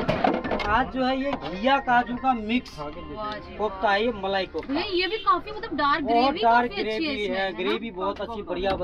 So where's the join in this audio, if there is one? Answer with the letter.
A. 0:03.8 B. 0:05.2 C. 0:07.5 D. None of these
D